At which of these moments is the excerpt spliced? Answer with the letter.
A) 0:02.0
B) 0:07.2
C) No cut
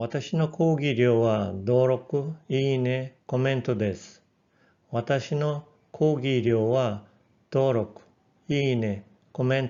C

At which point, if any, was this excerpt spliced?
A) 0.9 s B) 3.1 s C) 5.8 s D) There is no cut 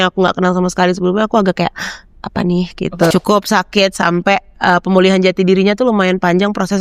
B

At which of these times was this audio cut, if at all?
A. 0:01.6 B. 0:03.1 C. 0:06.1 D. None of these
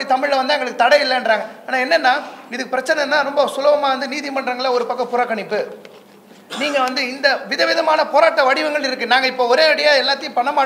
D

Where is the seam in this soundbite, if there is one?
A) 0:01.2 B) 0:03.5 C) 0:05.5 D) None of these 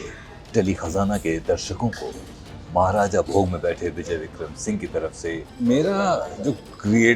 C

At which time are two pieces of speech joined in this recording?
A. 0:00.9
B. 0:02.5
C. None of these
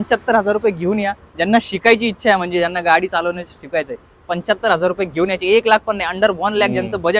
C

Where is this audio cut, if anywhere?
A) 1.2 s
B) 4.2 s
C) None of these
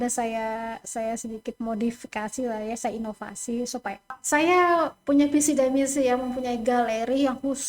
B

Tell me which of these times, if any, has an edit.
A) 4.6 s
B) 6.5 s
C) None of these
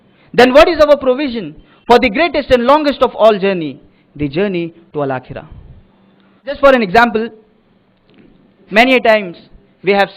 B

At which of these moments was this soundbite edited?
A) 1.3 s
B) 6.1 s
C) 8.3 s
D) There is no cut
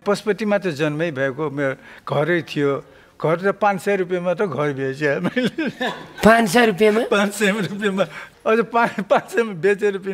C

